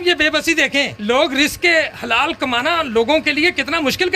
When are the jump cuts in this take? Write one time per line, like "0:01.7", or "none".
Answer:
0:00.9